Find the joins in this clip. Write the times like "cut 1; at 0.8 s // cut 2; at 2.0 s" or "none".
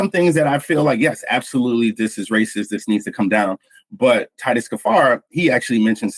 none